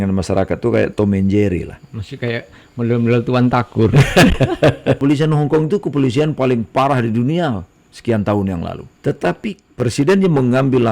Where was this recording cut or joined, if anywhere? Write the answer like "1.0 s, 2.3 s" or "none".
5.0 s, 8.8 s, 9.6 s

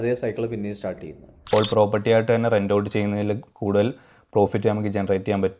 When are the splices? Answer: 1.3 s

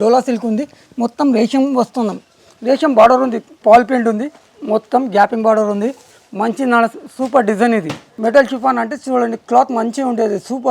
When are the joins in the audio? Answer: 3.6 s, 8.1 s

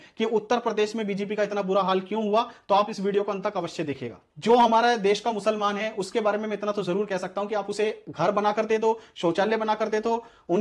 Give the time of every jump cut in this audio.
4.1 s

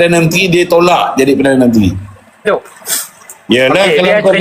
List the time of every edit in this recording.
2.4 s

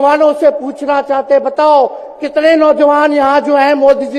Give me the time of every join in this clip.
none

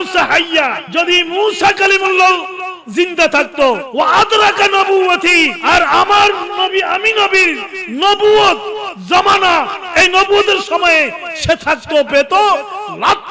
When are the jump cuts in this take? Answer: 0.8 s, 3.9 s, 5.6 s

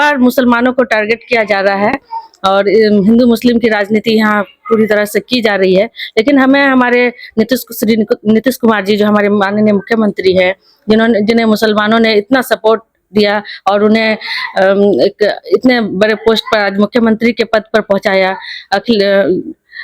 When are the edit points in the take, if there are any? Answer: none

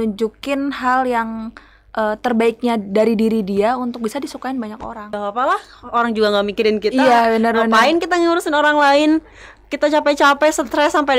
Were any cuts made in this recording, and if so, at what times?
5.2 s

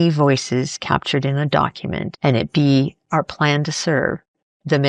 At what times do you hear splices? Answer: 2.1 s

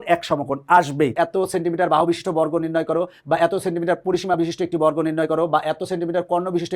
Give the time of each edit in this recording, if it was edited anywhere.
1.1 s

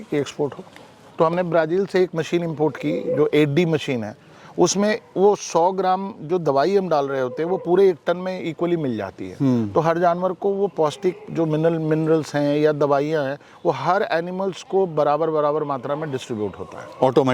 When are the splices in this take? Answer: 1.0 s

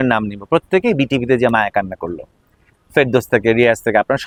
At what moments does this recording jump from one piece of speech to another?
none

